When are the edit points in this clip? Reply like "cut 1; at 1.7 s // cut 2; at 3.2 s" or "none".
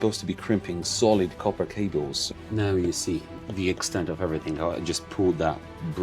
cut 1; at 2.2 s